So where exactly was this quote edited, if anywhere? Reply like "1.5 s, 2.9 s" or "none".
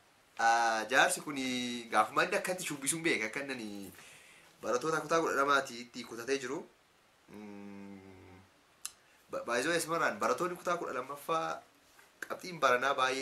none